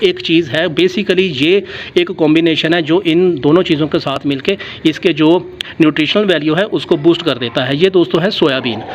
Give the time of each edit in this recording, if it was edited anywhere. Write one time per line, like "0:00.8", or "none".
none